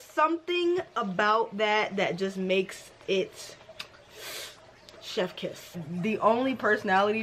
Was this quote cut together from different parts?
yes; 1 cut; at 5.8 s

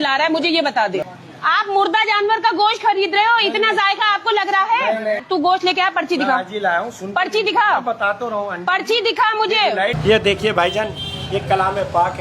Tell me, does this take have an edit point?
yes; 3 cuts; at 1.2 s, 5.2 s, 10.0 s

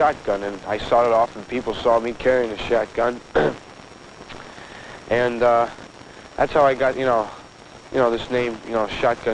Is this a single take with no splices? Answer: no; 1 cut; at 1.1 s

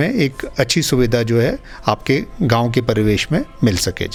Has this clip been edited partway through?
no; 0 cuts

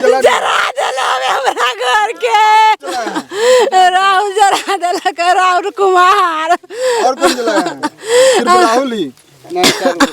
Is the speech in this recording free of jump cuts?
no; 1 cut; at 3.1 s

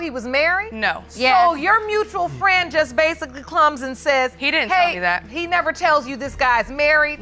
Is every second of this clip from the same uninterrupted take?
yes; 0 cuts

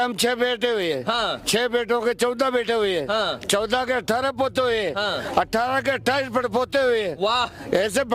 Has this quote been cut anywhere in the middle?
no; 0 cuts

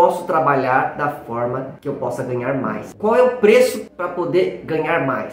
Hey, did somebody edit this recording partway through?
no; 0 cuts

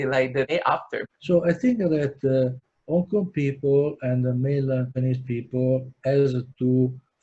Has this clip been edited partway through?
yes; 1 cut; at 1.0 s

